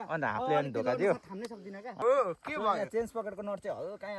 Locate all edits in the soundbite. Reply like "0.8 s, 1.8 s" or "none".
2.0 s